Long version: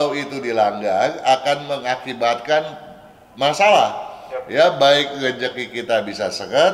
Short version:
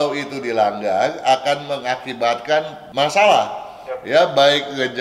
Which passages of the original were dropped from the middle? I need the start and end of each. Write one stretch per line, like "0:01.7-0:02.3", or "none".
0:02.8-0:03.2